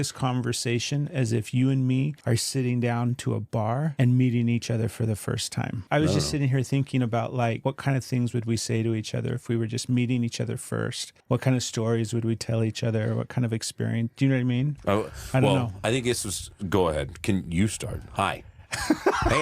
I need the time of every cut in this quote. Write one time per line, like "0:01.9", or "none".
0:02.2
0:03.9
0:05.8
0:07.6
0:11.1

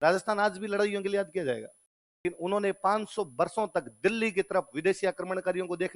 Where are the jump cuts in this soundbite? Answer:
0:02.2

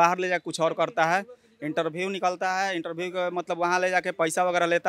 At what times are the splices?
none

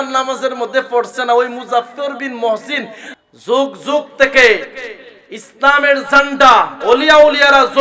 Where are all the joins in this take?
0:03.0

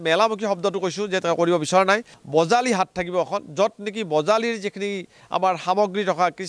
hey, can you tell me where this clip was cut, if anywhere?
0:02.1

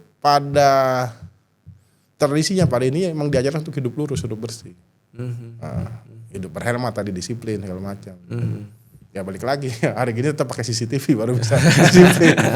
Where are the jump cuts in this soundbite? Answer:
none

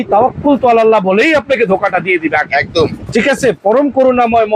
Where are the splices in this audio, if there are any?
none

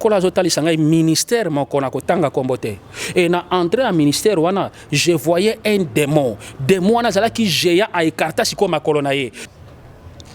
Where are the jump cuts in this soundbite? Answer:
0:09.4

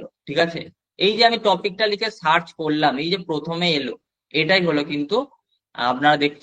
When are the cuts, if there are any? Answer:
none

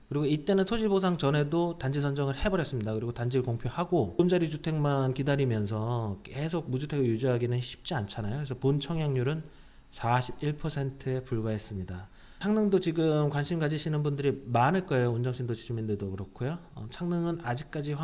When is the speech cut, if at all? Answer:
0:04.1
0:12.3

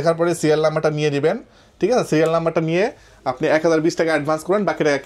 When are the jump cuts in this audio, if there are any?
none

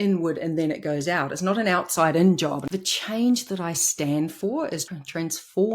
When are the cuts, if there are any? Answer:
0:02.6
0:04.8

